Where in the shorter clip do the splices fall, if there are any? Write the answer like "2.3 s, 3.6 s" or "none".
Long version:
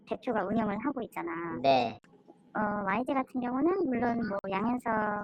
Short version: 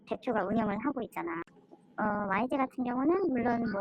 1.5 s